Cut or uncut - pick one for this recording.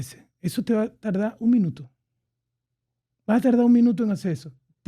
uncut